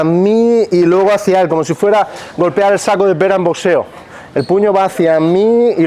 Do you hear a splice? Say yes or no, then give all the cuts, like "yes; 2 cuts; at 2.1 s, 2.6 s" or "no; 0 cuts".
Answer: no; 0 cuts